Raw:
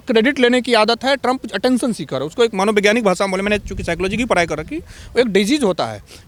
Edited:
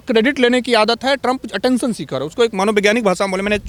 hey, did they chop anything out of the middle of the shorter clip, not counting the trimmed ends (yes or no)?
no